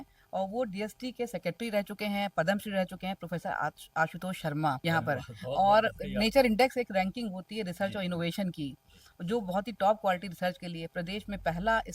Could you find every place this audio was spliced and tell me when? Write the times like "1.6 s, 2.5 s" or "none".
4.8 s